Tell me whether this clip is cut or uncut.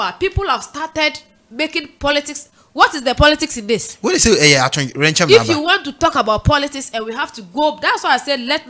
uncut